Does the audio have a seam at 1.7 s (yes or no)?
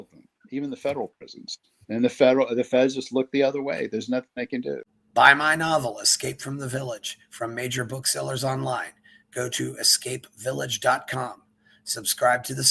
no